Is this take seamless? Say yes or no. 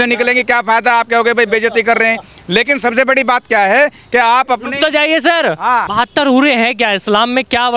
no